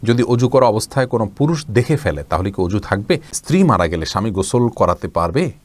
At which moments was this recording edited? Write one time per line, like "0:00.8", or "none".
0:03.4